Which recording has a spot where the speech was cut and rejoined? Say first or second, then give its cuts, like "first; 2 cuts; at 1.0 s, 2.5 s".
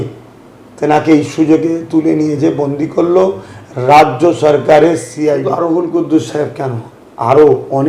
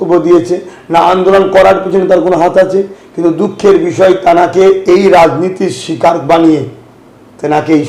first; 1 cut; at 5.4 s